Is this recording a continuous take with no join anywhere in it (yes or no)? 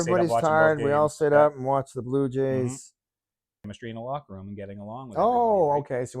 no